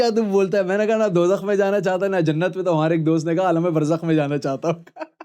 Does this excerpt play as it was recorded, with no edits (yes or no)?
yes